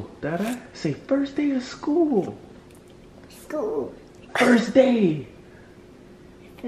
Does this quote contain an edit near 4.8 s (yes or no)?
no